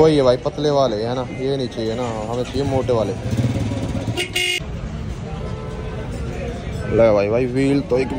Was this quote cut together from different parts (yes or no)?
no